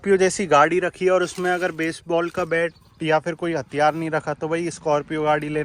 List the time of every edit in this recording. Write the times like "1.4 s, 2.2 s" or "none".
none